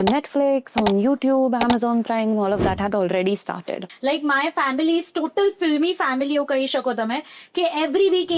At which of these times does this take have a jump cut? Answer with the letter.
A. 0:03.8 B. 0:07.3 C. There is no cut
A